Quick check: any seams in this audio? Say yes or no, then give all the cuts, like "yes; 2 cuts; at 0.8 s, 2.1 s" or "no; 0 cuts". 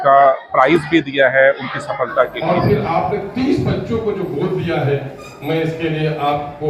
yes; 1 cut; at 2.4 s